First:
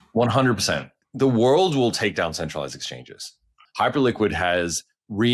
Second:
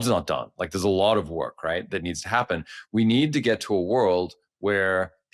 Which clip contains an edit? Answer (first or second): first